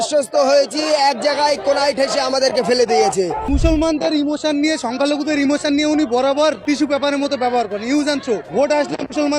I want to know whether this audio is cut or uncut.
cut